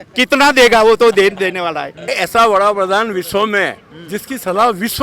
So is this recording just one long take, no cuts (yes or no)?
no